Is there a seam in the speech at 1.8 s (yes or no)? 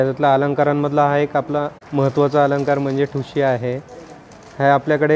yes